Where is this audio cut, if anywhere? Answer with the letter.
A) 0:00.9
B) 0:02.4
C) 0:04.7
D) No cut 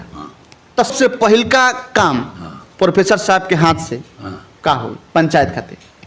A